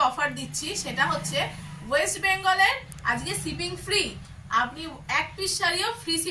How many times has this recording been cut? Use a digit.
0